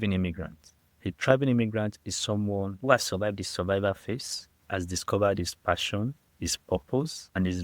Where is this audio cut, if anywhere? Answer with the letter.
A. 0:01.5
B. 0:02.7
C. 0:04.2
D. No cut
B